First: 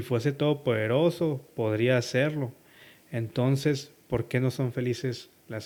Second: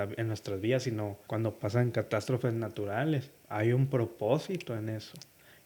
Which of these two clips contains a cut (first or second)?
second